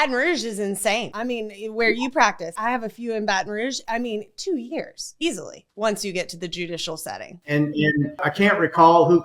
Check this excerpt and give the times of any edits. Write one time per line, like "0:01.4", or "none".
0:01.1
0:02.6
0:03.8
0:07.4
0:08.2